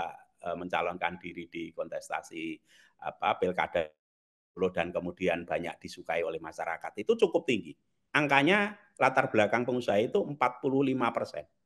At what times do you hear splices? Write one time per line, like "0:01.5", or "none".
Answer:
none